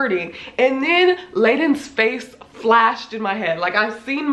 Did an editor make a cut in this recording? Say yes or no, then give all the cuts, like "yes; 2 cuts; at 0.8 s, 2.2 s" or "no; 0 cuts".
no; 0 cuts